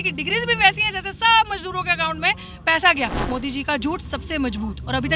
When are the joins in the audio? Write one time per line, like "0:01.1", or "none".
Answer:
0:03.2